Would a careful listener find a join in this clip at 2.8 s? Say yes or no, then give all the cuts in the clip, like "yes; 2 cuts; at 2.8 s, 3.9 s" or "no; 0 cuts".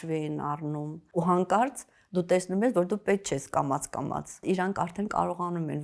no; 2 cuts; at 1.0 s, 4.4 s